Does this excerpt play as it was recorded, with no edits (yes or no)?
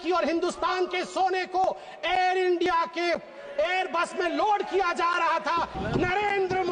no